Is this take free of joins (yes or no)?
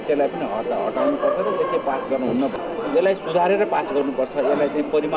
no